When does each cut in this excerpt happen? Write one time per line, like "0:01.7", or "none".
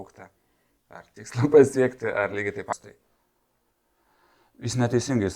0:02.7